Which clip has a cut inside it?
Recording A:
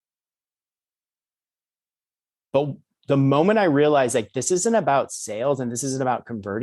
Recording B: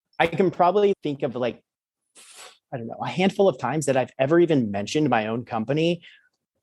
B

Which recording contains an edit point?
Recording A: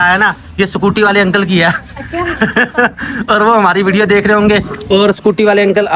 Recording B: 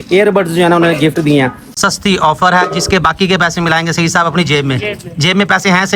B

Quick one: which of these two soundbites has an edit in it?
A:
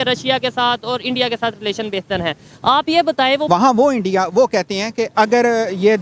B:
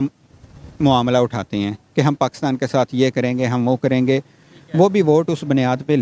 A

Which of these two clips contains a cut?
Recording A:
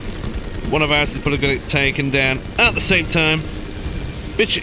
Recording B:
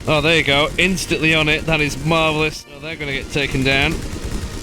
B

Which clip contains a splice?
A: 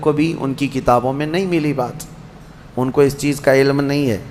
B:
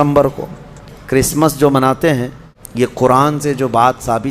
B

